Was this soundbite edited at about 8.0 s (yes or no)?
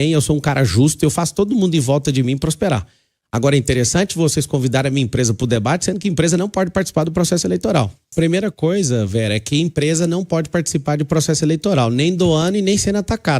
yes